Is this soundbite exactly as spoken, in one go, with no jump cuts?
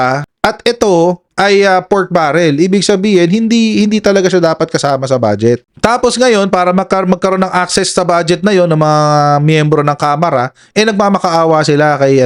yes; 0 cuts

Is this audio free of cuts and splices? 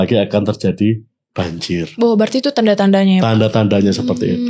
yes; 0 cuts

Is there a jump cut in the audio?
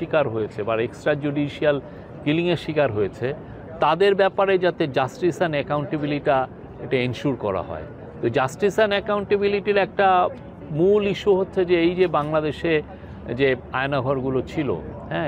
no; 0 cuts

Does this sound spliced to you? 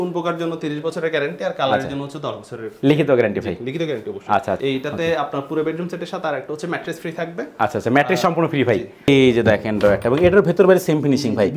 yes; 2 cuts; at 4.6 s, 9.1 s

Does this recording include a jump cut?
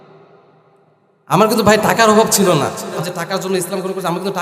yes; 1 cut; at 3.0 s

